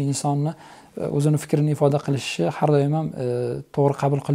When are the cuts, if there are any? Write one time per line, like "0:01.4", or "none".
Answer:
none